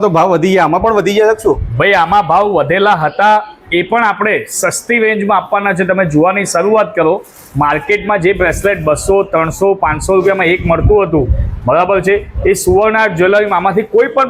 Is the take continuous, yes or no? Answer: yes